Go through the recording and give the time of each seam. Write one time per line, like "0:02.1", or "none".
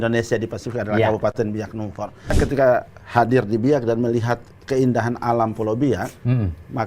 0:02.4